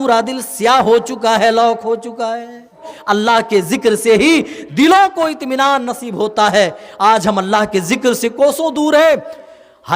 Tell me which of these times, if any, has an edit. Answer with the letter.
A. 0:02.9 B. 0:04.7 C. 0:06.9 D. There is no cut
A